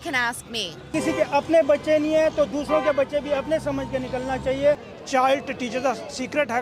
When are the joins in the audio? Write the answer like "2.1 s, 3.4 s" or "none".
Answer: 0.9 s, 4.9 s